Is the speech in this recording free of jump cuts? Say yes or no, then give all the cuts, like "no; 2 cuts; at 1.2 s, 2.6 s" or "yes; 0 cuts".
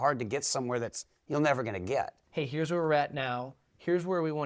no; 1 cut; at 2.2 s